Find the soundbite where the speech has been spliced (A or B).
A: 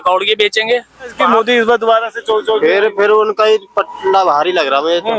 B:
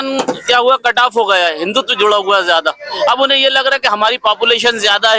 A